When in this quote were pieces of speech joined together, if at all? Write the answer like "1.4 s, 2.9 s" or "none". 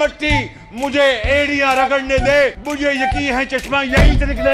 2.6 s